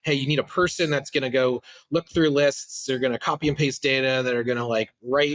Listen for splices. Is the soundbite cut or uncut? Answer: uncut